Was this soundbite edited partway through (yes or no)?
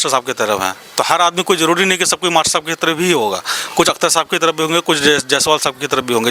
no